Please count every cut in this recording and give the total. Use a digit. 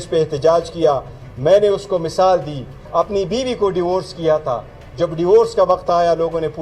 1